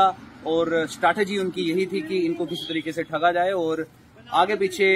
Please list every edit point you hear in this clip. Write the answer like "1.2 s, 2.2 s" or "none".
none

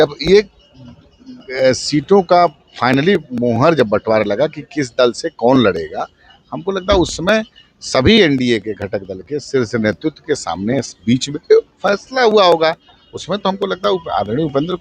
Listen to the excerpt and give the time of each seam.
none

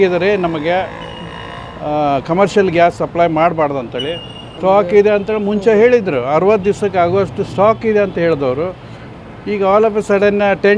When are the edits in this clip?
4.4 s

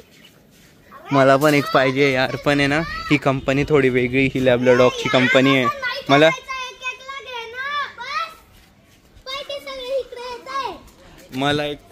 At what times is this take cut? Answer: none

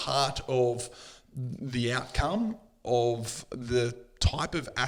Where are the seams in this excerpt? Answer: none

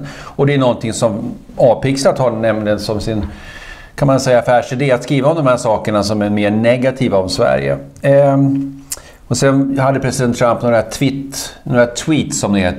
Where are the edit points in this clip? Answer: 7.3 s

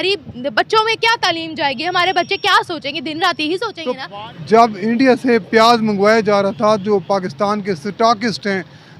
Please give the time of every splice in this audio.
4.0 s

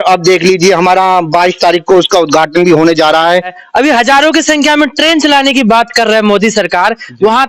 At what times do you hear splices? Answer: 3.6 s

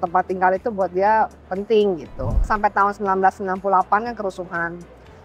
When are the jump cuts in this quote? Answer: 2.5 s

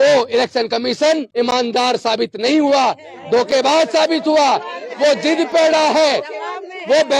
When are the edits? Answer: 1.3 s

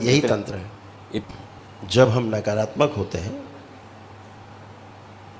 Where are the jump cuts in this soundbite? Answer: 1.2 s, 3.8 s

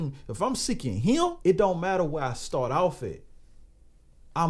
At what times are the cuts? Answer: 1.4 s

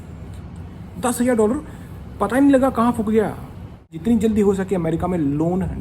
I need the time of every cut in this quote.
4.0 s

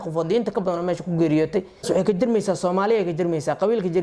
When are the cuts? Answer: 1.8 s

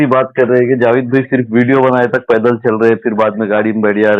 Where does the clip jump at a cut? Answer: none

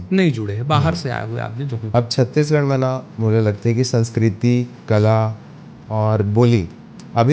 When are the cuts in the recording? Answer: 1.8 s

